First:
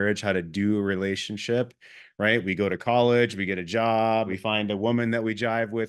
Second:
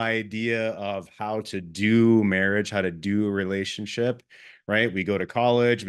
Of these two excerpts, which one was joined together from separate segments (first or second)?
first